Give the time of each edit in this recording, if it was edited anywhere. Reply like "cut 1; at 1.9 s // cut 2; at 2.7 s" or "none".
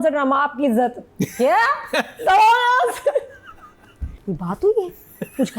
cut 1; at 4.1 s